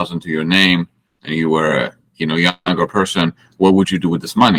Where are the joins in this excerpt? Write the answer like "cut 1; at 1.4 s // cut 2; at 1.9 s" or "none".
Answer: none